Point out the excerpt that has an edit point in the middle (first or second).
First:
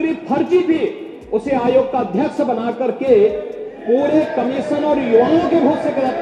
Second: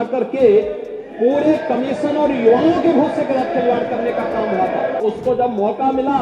second